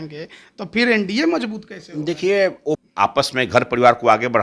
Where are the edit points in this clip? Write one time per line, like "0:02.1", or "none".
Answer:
0:02.8